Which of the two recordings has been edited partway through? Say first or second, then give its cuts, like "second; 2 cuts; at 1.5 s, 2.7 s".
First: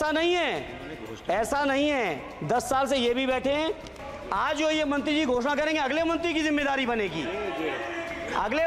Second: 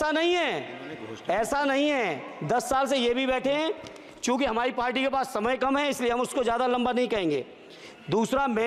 first; 1 cut; at 4.1 s